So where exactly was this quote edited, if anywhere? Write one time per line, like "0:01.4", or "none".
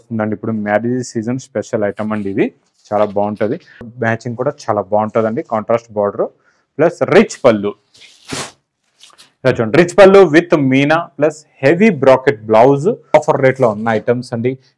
0:03.9
0:13.1